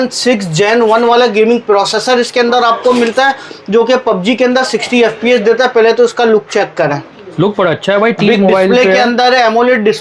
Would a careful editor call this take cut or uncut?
uncut